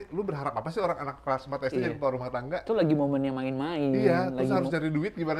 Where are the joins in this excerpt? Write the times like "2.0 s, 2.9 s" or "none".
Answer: none